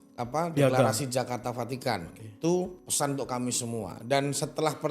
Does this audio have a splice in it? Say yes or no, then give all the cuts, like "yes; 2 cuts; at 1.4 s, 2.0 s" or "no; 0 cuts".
yes; 1 cut; at 2.8 s